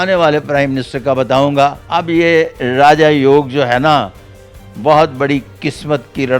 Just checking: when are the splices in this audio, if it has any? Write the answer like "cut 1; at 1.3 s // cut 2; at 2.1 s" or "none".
cut 1; at 1.8 s